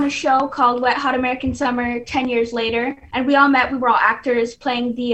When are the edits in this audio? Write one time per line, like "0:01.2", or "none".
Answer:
0:03.0